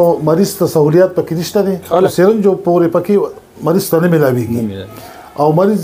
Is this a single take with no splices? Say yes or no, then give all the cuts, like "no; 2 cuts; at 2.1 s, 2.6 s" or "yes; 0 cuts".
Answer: no; 1 cut; at 2.1 s